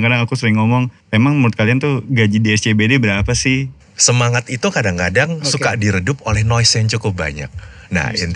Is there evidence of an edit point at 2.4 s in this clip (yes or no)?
no